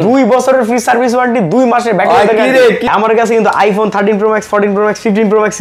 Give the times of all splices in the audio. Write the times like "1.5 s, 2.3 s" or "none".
2.9 s